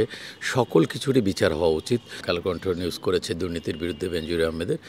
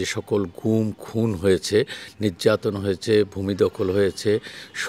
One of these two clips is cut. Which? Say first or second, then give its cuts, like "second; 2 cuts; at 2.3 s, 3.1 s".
first; 1 cut; at 2.2 s